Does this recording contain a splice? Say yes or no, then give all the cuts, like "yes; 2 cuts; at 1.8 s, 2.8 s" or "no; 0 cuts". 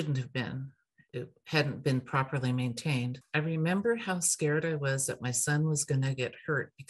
yes; 2 cuts; at 1.1 s, 3.1 s